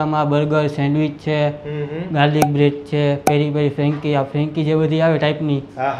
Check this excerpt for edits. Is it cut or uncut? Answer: uncut